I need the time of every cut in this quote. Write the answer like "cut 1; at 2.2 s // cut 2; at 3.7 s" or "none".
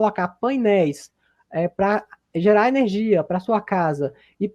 none